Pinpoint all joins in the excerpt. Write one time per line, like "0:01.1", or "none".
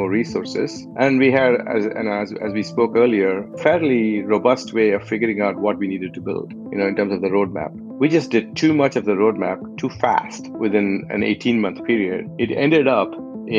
none